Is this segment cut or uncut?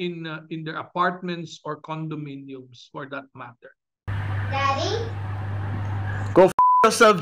cut